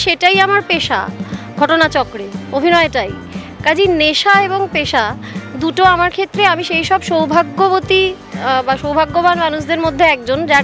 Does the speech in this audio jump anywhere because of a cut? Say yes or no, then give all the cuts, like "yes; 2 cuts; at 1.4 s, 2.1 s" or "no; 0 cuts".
no; 0 cuts